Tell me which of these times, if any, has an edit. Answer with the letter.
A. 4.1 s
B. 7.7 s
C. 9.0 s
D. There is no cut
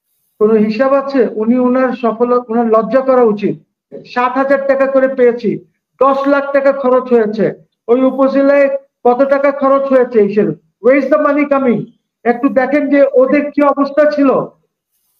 A